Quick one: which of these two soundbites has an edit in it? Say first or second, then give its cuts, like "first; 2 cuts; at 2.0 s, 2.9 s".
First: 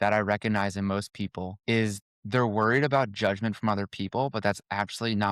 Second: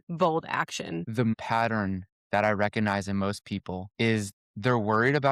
second; 1 cut; at 1.4 s